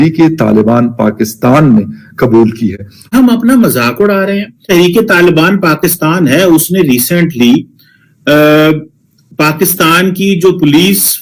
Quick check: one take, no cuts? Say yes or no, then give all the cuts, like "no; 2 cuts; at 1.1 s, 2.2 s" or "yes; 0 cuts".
yes; 0 cuts